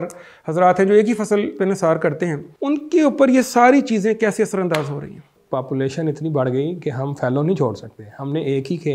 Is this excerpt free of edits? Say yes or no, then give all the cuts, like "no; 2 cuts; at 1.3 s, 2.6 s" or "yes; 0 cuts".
no; 2 cuts; at 2.5 s, 5.3 s